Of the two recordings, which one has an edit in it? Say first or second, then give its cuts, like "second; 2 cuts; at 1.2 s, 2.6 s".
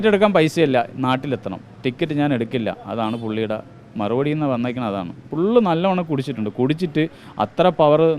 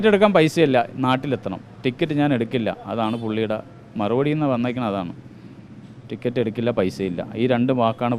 first; 1 cut; at 5.2 s